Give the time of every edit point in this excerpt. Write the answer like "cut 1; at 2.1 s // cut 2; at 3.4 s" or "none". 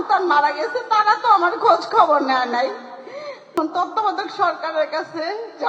cut 1; at 3.5 s